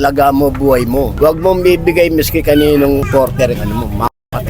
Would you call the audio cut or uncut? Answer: cut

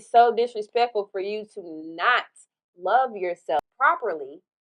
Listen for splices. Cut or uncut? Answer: cut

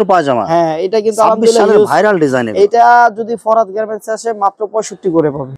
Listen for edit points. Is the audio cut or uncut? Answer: uncut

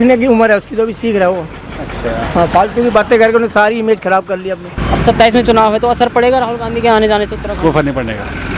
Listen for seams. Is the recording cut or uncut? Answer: cut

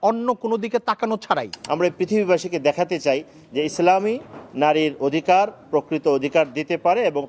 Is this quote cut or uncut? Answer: cut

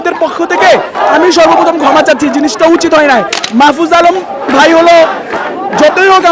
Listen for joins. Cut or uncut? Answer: cut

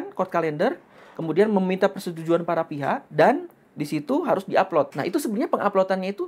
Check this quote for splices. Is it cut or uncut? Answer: cut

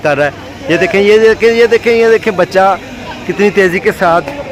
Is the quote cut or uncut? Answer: uncut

